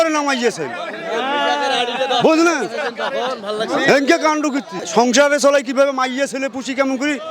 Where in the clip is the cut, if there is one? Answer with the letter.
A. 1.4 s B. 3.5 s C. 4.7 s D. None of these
C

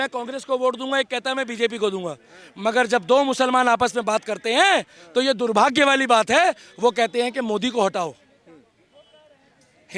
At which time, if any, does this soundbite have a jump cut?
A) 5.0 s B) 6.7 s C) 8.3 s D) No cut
D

